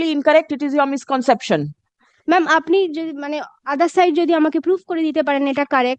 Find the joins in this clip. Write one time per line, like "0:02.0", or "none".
none